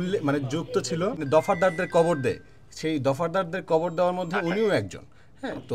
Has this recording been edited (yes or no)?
yes